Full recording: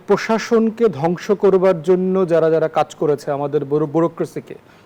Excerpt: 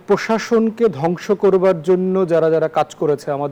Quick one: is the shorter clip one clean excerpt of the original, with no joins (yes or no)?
yes